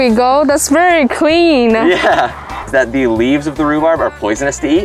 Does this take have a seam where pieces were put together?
yes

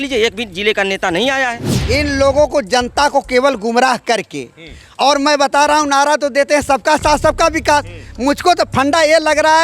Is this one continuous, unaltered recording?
no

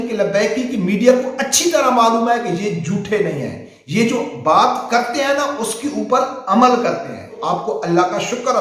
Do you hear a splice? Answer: yes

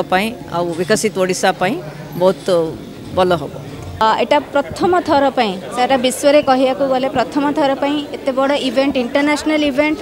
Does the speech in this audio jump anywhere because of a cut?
yes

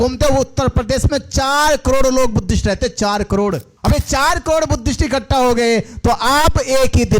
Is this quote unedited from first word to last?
no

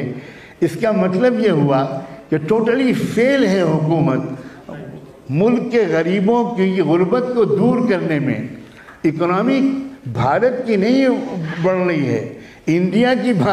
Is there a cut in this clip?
no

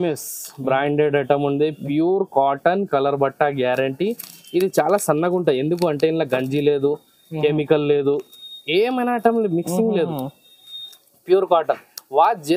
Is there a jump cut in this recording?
no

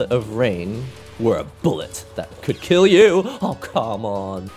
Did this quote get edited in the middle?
no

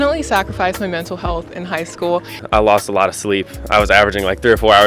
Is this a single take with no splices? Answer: no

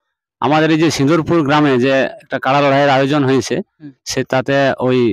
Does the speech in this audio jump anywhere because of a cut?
no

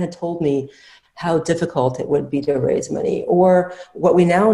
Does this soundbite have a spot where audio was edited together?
no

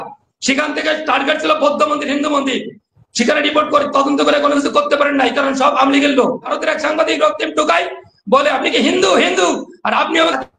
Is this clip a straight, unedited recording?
no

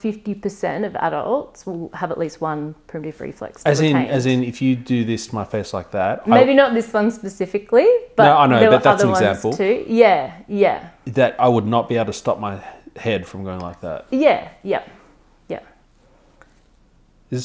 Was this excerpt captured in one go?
yes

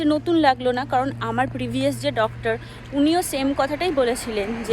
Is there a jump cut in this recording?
no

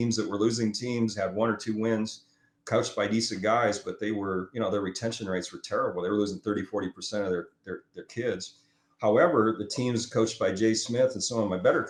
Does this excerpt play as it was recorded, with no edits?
yes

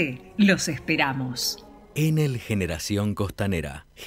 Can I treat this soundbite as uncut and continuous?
no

